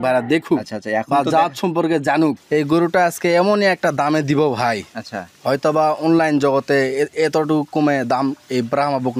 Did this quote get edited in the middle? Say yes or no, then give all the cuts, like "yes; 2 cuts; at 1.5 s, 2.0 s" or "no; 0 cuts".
yes; 1 cut; at 2.4 s